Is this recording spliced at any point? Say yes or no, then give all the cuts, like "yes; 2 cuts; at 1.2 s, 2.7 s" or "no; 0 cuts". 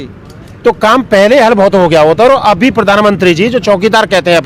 no; 0 cuts